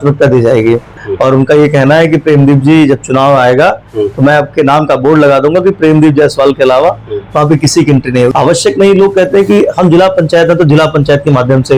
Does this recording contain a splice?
yes; 2 cuts; at 0.9 s, 8.3 s

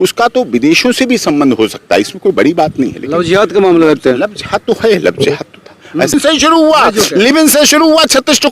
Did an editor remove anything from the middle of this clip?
yes; 1 cut; at 6.1 s

